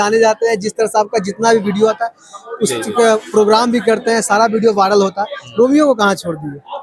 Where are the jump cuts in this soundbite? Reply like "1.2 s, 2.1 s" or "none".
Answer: none